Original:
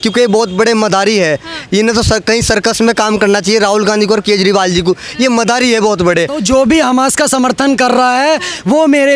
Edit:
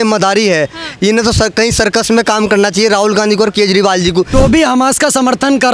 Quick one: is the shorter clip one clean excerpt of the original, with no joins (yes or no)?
no